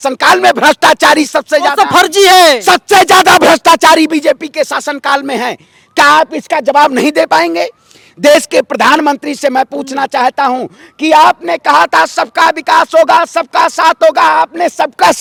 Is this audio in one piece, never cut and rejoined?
yes; 0 cuts

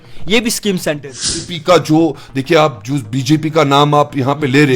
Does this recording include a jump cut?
yes; 1 cut; at 1.3 s

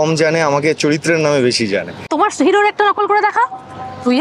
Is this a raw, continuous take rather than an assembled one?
no; 1 cut; at 2.1 s

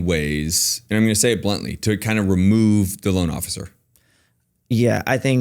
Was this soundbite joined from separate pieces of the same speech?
no; 0 cuts

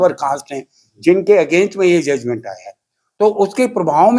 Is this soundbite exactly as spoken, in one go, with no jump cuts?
yes; 0 cuts

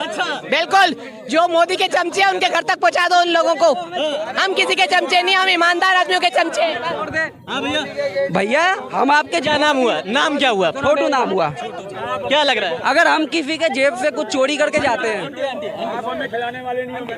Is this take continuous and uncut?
yes; 0 cuts

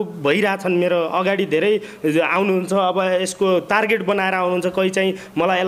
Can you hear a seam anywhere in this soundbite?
no; 0 cuts

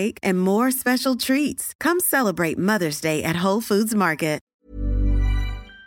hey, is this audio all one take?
no; 1 cut; at 4.5 s

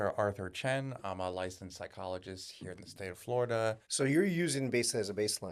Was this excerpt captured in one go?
no; 1 cut; at 3.9 s

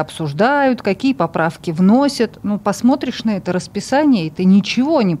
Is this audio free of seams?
yes; 0 cuts

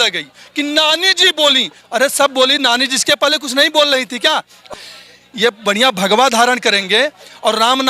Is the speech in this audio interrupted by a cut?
yes; 1 cut; at 4.6 s

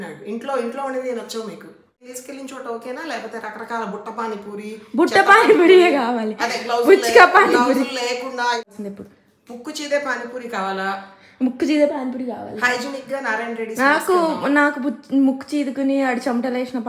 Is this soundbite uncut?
no; 2 cuts; at 2.2 s, 8.6 s

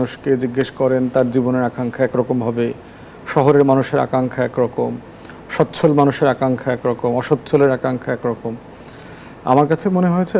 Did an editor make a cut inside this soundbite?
no; 0 cuts

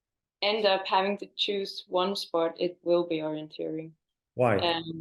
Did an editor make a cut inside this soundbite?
no; 0 cuts

